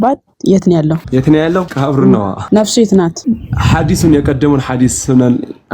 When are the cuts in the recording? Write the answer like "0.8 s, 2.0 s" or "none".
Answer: 1.0 s, 1.7 s, 2.4 s, 3.2 s

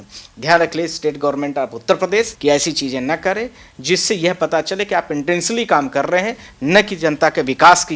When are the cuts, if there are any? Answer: 2.3 s

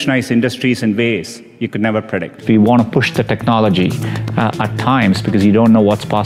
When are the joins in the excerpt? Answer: 2.4 s

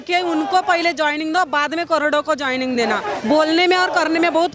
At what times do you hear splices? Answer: none

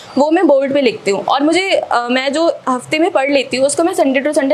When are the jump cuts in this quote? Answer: none

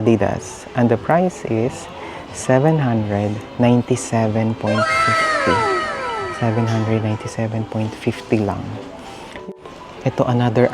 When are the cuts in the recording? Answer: 9.3 s

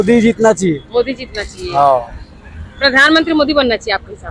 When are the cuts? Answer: none

